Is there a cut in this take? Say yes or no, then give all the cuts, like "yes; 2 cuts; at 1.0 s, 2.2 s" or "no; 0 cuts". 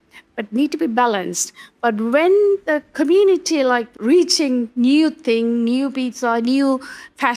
yes; 1 cut; at 3.9 s